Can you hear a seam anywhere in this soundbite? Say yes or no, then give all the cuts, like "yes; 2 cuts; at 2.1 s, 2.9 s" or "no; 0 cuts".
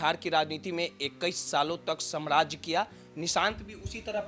no; 0 cuts